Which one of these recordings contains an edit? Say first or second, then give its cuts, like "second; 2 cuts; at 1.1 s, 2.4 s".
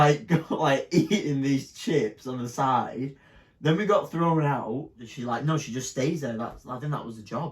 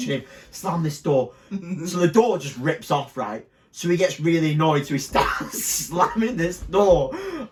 first; 1 cut; at 5.1 s